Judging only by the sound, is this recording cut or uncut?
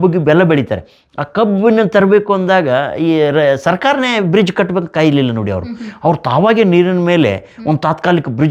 uncut